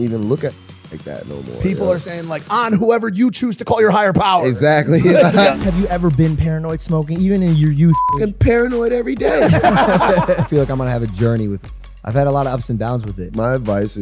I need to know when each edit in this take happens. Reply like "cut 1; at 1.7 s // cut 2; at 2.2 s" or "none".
cut 1; at 5.5 s // cut 2; at 10.4 s // cut 3; at 11.6 s // cut 4; at 13.2 s